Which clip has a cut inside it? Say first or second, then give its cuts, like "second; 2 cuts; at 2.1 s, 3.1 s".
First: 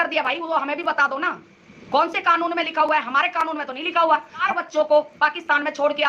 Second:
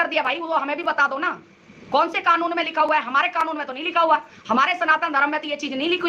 first; 1 cut; at 4.4 s